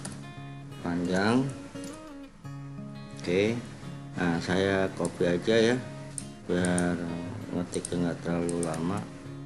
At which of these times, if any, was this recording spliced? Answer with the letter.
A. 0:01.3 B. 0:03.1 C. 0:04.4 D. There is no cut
D